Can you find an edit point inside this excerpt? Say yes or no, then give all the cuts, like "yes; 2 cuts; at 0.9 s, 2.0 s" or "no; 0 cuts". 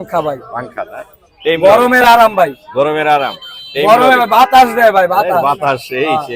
no; 0 cuts